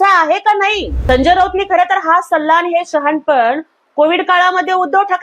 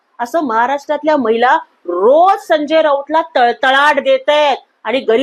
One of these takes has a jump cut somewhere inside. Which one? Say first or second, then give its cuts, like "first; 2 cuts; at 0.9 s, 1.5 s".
first; 1 cut; at 0.9 s